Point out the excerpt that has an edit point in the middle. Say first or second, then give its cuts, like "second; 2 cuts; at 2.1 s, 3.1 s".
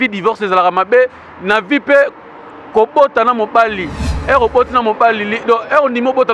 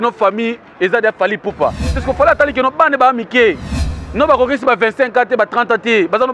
second; 1 cut; at 2.0 s